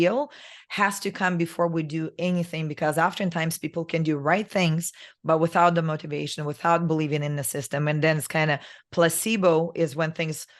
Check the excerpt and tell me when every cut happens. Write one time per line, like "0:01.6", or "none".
none